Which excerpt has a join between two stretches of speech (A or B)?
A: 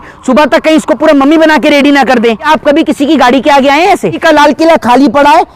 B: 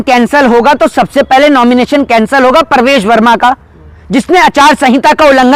A